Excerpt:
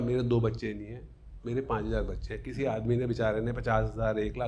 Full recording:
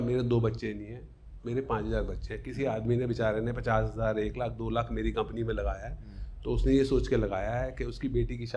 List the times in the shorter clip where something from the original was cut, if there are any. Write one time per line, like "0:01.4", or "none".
none